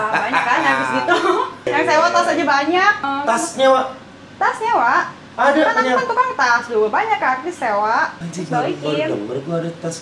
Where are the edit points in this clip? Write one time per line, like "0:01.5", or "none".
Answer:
0:01.7
0:03.0
0:08.3